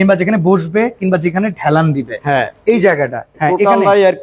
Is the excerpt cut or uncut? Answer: cut